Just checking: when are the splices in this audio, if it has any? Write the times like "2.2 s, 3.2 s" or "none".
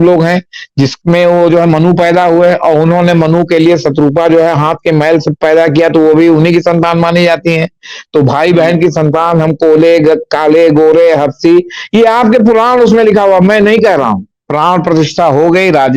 14.3 s